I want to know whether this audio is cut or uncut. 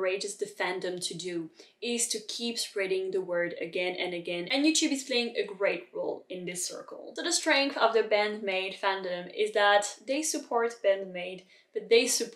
uncut